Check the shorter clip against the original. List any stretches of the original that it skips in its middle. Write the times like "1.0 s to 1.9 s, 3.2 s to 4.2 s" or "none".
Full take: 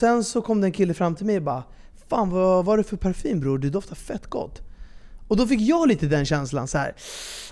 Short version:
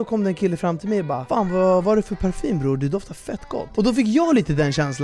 1.6 s to 2.0 s, 4.5 s to 5.2 s

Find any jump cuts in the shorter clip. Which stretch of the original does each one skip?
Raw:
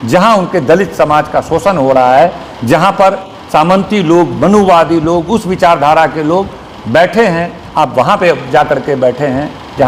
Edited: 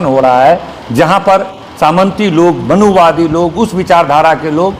none

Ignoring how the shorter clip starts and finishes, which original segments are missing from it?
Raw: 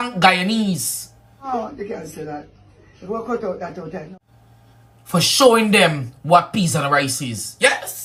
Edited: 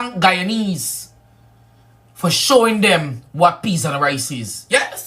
1.3 s to 4.2 s

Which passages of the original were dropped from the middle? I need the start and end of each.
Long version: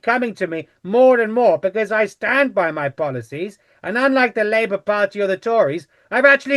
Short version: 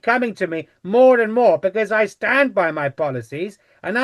none

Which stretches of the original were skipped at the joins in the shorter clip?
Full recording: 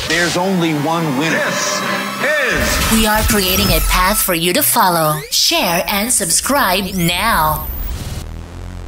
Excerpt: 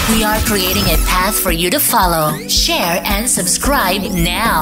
none

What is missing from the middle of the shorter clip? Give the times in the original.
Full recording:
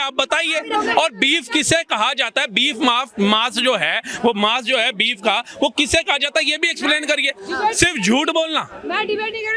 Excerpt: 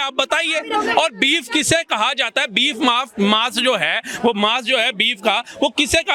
none

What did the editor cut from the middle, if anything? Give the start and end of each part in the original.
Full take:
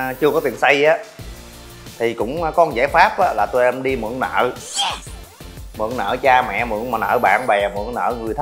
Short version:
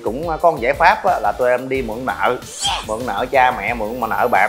5.0 s to 5.7 s

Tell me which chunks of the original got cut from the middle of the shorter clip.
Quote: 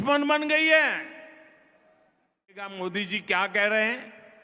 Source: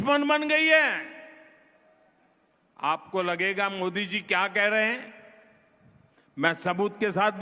2.7 s to 3.7 s

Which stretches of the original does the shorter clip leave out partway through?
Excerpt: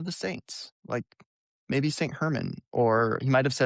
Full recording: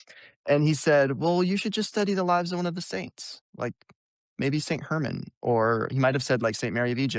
none

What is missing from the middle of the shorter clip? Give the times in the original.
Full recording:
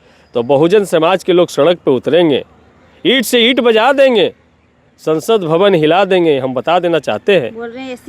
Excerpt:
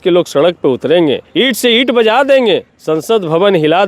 2.5 s to 2.9 s, 4.4 s to 4.9 s

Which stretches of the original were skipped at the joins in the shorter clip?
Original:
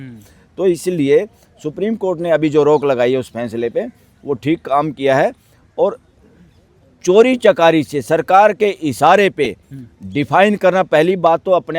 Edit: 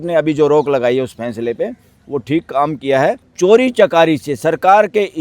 5.4 s to 6.9 s

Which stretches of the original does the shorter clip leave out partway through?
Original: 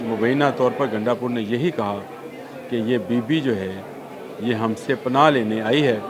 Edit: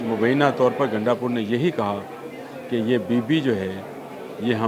none

